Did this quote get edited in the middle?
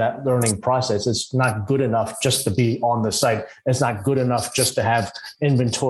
no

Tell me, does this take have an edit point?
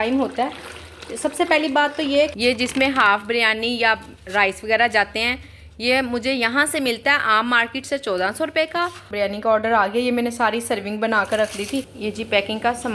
yes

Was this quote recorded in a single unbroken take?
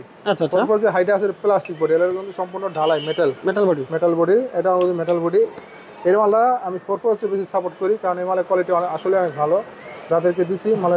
yes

